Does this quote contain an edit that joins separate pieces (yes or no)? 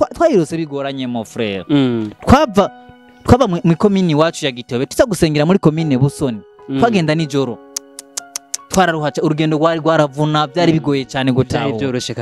no